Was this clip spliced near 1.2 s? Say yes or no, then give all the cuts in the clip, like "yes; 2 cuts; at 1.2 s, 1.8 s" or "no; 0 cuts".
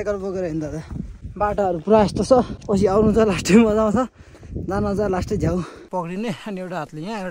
yes; 3 cuts; at 1.2 s, 2.6 s, 5.8 s